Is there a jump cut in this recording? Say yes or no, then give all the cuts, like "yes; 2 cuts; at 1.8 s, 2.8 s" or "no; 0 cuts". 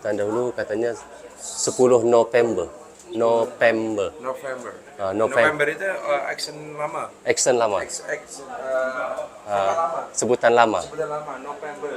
no; 0 cuts